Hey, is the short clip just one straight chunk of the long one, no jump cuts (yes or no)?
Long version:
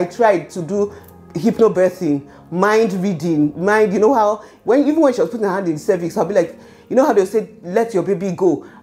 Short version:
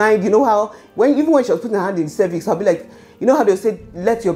yes